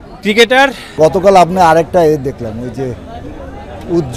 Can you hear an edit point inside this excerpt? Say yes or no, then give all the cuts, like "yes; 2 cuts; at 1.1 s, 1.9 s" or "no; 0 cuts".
yes; 1 cut; at 0.9 s